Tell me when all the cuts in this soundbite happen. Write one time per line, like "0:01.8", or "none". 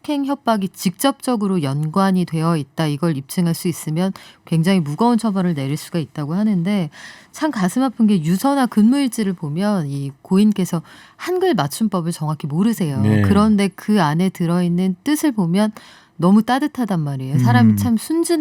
none